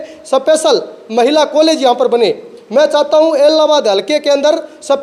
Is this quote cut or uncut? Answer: uncut